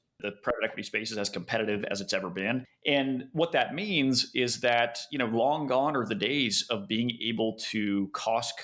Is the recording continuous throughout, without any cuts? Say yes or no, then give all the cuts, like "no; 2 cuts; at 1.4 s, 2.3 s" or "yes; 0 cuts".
no; 1 cut; at 2.7 s